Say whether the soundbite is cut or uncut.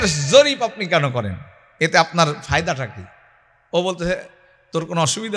uncut